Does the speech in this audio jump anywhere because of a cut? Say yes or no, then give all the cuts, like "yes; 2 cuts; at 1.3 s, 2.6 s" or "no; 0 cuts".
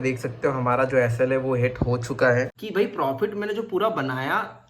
yes; 1 cut; at 2.6 s